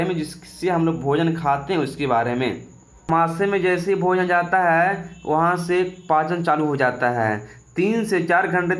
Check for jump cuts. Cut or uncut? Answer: cut